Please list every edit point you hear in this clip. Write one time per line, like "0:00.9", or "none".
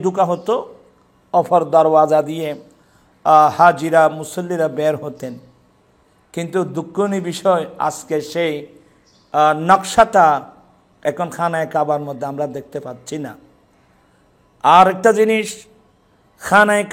none